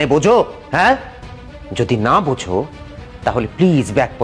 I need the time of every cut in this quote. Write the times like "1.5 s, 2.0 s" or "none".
none